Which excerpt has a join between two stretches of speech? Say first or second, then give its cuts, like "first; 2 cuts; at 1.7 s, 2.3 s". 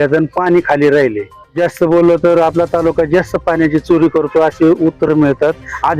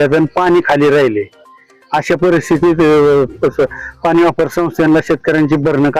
first; 2 cuts; at 1.6 s, 5.1 s